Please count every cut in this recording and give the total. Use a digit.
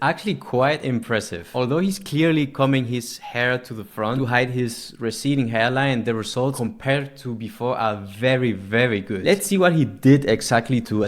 4